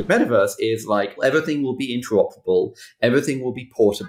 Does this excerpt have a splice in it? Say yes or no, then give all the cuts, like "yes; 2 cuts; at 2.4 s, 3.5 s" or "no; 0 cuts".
yes; 1 cut; at 1.2 s